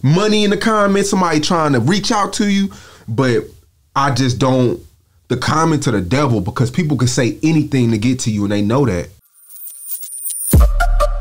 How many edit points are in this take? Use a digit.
1